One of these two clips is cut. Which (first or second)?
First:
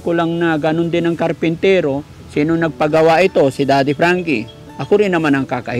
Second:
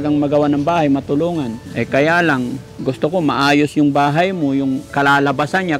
second